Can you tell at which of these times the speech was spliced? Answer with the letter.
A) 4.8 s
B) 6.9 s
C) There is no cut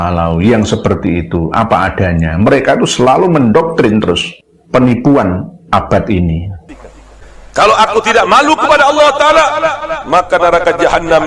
B